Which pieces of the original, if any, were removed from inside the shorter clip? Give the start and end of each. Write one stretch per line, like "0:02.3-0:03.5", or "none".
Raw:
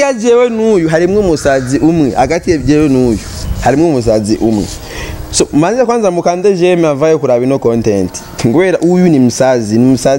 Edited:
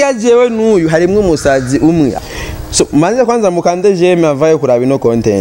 0:02.1-0:04.7